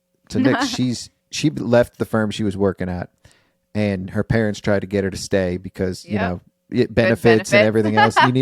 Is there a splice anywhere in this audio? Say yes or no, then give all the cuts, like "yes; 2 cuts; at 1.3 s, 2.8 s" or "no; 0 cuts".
yes; 1 cut; at 1.2 s